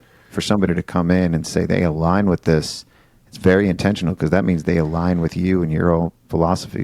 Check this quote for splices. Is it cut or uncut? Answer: uncut